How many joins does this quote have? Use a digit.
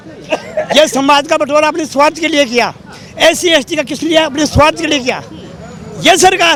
0